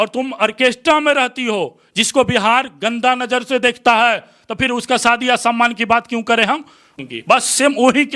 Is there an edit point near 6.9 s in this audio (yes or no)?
yes